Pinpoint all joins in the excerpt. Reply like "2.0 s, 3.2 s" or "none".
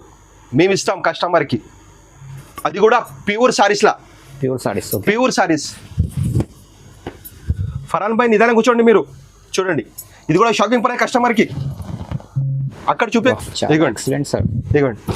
13.3 s